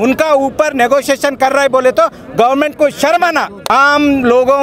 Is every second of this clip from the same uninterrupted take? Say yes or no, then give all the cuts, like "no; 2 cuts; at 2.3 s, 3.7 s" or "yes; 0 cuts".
no; 1 cut; at 3.7 s